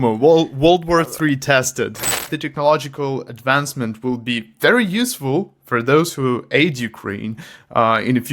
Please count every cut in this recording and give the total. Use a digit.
1